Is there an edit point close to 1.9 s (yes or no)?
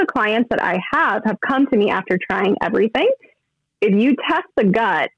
no